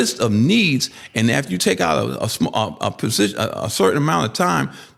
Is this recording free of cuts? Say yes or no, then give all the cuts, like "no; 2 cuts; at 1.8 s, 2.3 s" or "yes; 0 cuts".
yes; 0 cuts